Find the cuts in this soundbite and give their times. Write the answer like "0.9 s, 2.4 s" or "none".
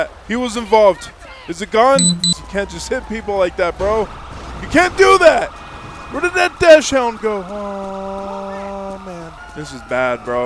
2.3 s, 9.4 s